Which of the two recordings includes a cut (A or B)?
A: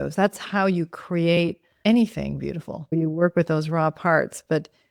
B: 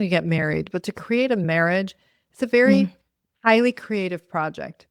A